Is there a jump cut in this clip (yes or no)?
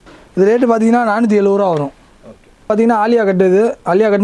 yes